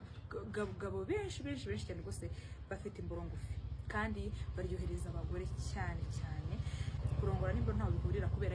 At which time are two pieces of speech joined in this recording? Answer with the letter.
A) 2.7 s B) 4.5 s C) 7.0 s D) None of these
C